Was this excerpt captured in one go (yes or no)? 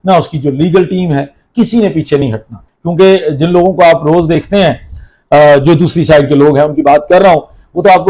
no